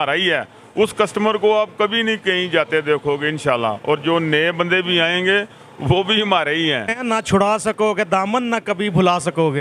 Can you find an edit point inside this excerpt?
yes; 1 cut; at 7.0 s

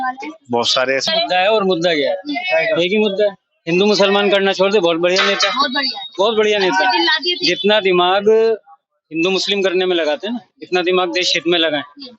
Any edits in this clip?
yes; 1 cut; at 1.0 s

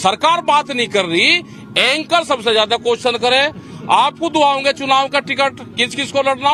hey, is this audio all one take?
yes; 0 cuts

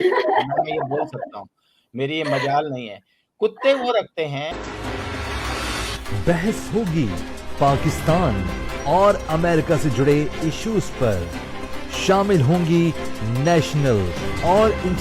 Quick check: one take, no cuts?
no; 1 cut; at 4.5 s

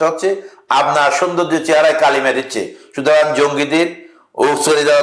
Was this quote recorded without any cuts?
yes; 0 cuts

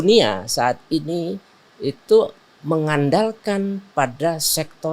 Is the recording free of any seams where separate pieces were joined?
yes; 0 cuts

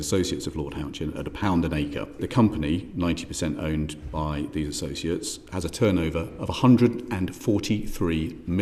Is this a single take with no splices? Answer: no; 1 cut; at 2.2 s

